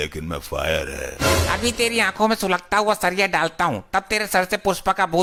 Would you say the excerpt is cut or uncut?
uncut